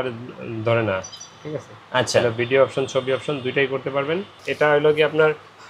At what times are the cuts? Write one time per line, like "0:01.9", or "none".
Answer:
0:04.4